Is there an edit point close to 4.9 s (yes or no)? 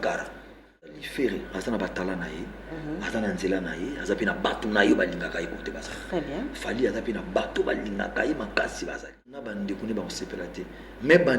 no